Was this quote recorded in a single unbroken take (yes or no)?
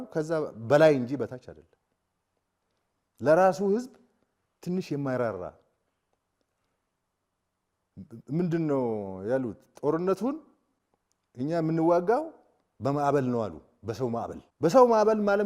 no